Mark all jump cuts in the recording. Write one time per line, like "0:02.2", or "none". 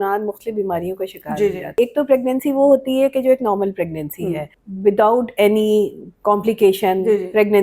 0:01.6